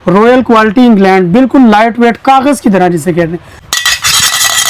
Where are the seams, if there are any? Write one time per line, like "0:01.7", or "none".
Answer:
0:03.6